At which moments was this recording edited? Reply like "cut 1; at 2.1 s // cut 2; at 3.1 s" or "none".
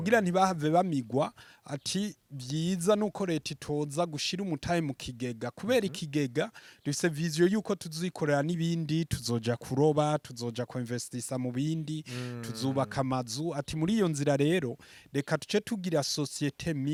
none

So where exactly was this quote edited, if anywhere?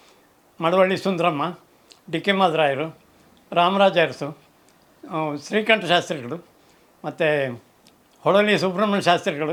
none

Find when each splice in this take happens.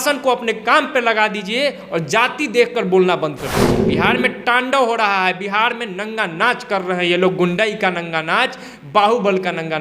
cut 1; at 3.8 s

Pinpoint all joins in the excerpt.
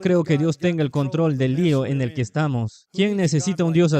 cut 1; at 2.8 s

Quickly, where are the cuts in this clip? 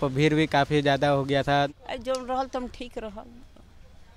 cut 1; at 1.7 s

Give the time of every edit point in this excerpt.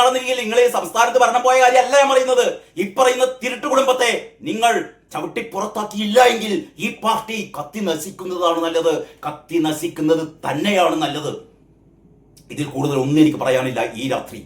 none

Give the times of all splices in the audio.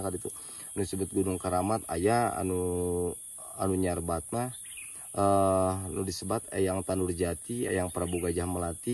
none

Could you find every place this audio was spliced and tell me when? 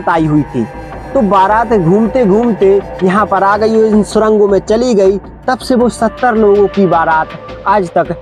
none

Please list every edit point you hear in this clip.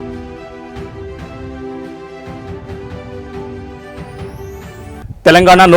cut 1; at 4.7 s

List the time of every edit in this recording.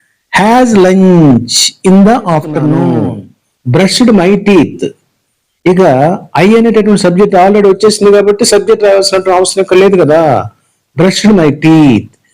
cut 1; at 2.9 s

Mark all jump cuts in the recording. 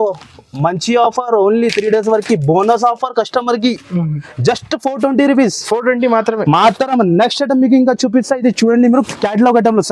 none

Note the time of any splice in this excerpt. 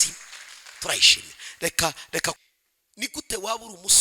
cut 1; at 2.4 s

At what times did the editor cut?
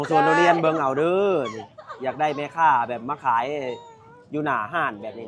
none

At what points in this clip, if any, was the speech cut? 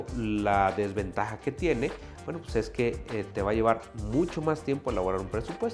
none

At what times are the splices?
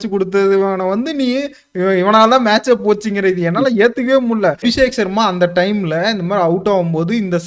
cut 1; at 4.6 s

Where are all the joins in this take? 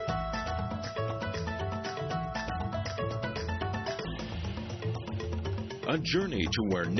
cut 1; at 2.4 s

